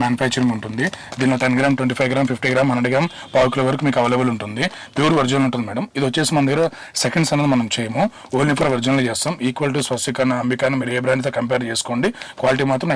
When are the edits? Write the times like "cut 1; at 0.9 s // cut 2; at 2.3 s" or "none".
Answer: none